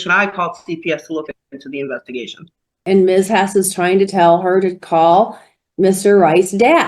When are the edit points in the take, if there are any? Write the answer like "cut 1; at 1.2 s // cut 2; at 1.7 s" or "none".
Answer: cut 1; at 2.8 s